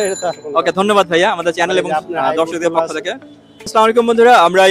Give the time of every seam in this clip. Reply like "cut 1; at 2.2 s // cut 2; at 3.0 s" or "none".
cut 1; at 3.7 s